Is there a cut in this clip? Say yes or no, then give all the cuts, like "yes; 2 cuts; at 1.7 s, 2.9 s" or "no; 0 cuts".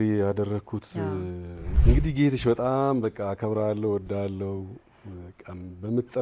yes; 1 cut; at 1.6 s